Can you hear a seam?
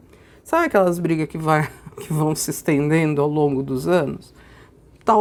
no; 0 cuts

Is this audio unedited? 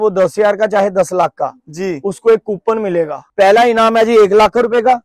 no; 1 cut; at 3.2 s

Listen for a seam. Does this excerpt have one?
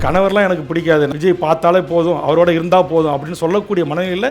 yes; 1 cut; at 1.1 s

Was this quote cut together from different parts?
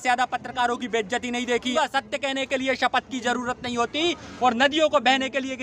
yes; 1 cut; at 1.6 s

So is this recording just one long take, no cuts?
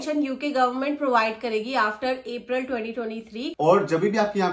no; 1 cut; at 3.5 s

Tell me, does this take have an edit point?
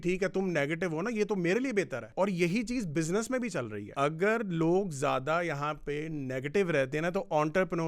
yes; 2 cuts; at 2.1 s, 3.8 s

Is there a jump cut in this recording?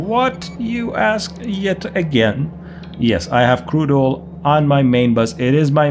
no; 0 cuts

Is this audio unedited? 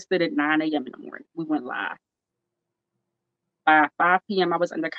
yes; 0 cuts

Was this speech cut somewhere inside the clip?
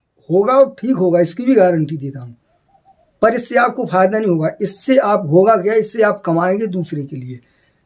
no; 0 cuts

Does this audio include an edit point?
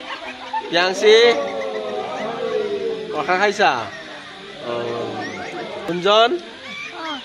yes; 1 cut; at 5.9 s

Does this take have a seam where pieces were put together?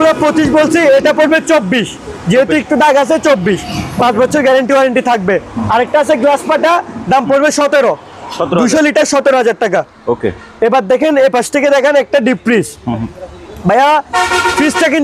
no; 0 cuts

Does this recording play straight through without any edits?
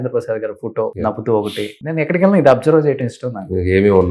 no; 2 cuts; at 0.9 s, 1.8 s

